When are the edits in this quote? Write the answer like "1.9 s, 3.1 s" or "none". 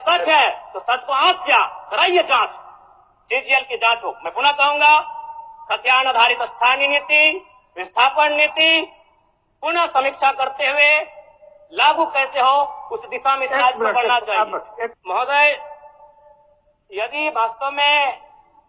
15.0 s